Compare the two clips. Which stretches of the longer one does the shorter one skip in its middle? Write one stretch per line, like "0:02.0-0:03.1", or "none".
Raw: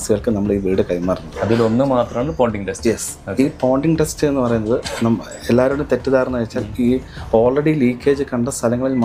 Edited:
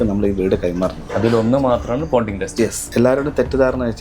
0:03.1-0:05.3